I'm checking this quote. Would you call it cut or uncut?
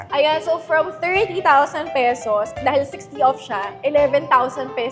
uncut